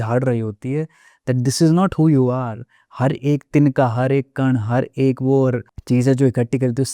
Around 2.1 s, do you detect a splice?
no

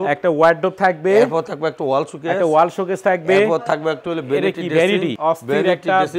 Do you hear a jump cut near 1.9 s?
no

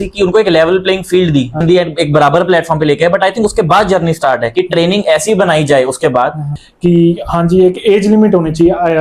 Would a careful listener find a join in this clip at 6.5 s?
yes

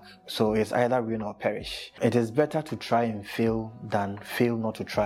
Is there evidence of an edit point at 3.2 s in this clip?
no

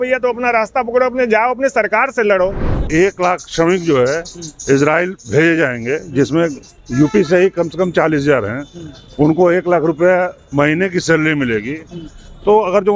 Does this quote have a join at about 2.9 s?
yes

